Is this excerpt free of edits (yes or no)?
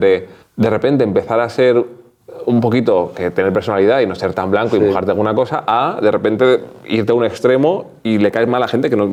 yes